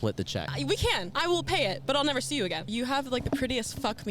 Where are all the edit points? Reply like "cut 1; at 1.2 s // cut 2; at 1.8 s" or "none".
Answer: cut 1; at 1.0 s // cut 2; at 2.7 s